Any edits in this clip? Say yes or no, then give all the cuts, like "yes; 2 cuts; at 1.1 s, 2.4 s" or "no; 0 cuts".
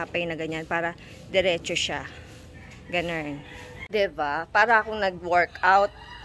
no; 0 cuts